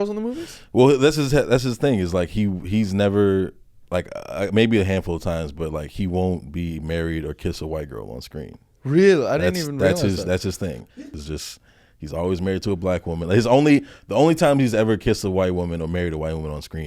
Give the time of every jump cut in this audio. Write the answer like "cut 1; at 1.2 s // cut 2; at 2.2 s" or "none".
cut 1; at 10.9 s

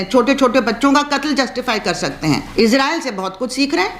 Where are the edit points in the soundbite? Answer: cut 1; at 2.5 s

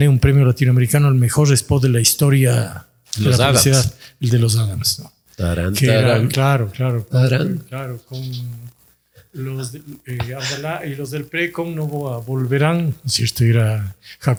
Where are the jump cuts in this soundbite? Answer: none

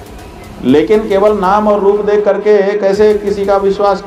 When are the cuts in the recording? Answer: none

